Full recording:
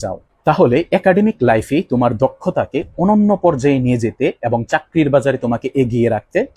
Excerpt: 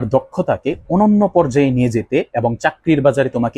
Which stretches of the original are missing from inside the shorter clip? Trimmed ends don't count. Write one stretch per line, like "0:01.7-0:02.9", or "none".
none

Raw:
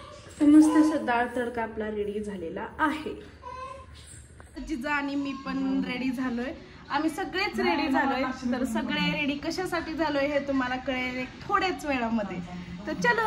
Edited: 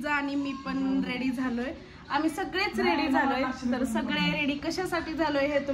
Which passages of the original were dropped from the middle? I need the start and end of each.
none

